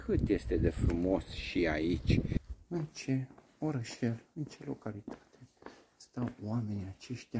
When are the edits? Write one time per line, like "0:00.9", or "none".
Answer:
0:02.4